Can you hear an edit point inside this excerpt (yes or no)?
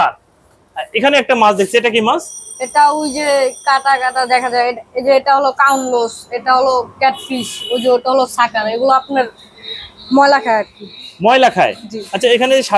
no